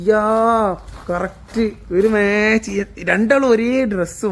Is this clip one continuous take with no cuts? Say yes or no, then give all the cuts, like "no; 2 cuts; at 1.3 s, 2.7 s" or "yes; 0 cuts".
yes; 0 cuts